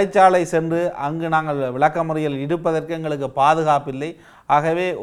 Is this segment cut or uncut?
uncut